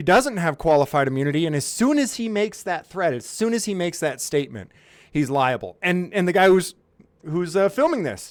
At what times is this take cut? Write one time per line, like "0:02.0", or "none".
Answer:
none